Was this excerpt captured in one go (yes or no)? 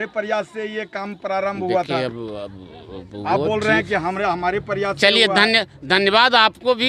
yes